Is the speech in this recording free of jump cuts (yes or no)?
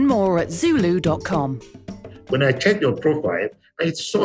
no